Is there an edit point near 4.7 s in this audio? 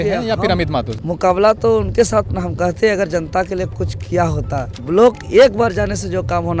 yes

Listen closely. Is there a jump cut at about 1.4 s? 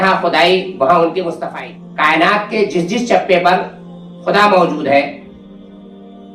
yes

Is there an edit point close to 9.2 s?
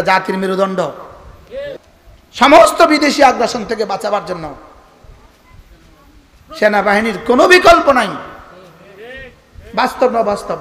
no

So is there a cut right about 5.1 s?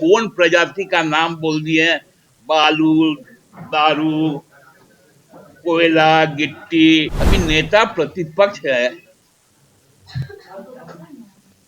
no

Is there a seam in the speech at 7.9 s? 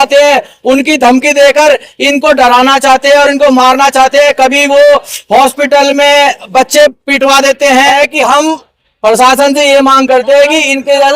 yes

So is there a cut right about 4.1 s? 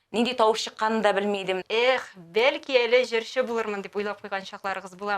no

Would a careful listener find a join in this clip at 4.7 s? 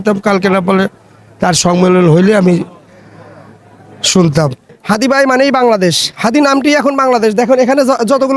yes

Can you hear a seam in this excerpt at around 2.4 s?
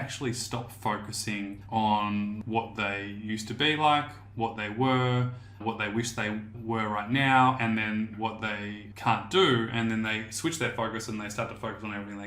yes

